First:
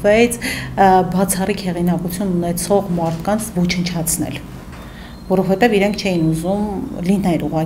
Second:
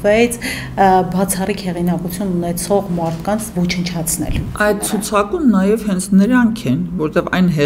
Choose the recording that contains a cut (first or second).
second